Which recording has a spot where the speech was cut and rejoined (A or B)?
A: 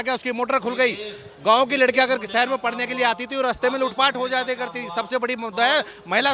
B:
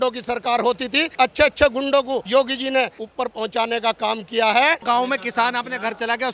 B